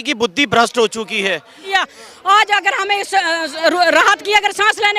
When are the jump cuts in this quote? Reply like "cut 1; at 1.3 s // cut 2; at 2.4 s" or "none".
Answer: cut 1; at 1.7 s